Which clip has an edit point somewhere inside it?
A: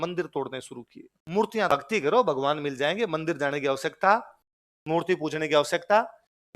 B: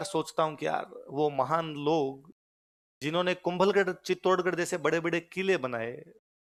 A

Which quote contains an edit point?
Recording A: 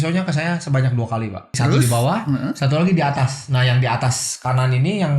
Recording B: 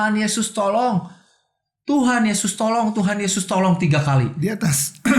A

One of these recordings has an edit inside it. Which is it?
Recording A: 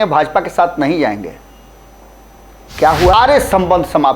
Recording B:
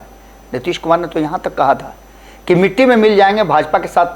A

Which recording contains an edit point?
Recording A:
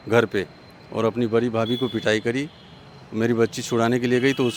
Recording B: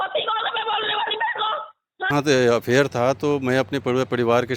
B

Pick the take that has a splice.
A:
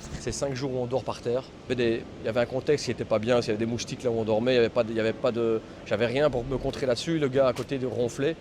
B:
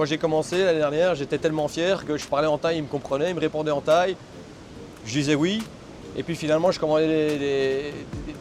A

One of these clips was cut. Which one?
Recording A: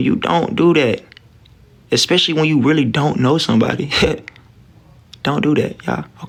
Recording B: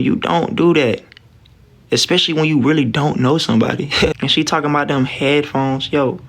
B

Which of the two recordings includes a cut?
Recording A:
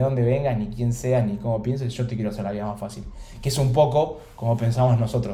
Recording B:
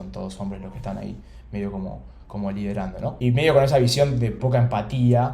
B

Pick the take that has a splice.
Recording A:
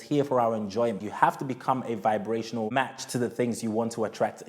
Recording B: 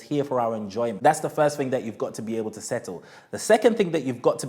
A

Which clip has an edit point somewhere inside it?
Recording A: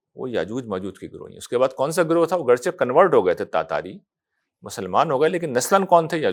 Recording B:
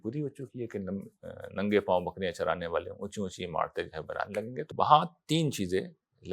B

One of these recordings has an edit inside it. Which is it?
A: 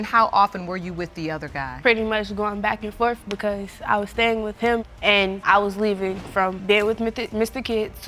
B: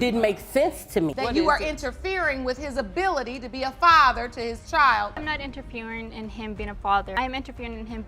B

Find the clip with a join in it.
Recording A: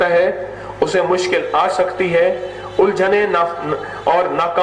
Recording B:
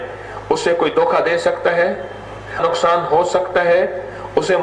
B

